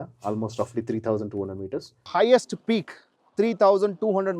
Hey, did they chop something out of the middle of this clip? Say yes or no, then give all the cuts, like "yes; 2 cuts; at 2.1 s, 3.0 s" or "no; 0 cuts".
yes; 1 cut; at 2.0 s